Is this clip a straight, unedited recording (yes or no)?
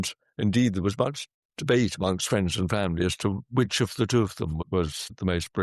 no